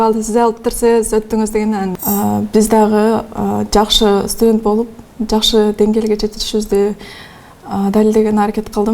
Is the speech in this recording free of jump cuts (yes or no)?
no